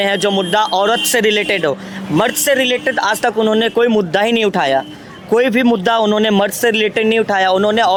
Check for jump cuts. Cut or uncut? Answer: uncut